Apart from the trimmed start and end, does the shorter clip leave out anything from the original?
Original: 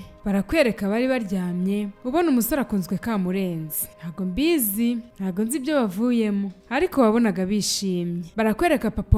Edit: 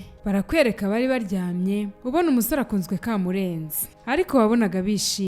yes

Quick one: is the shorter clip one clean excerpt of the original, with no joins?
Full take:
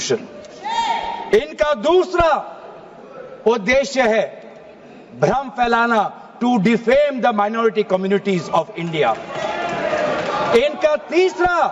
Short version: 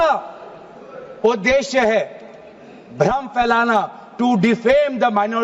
yes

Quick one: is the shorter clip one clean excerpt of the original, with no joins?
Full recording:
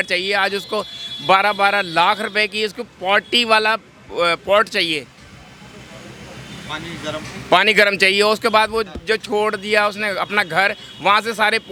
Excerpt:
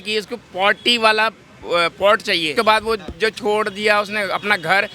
no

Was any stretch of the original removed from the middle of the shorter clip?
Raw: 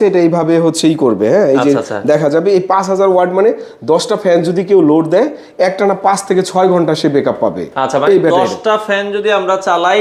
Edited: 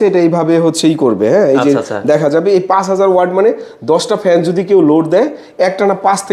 no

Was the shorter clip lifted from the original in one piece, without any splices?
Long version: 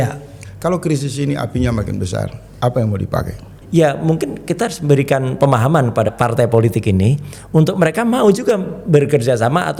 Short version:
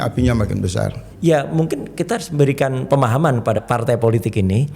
no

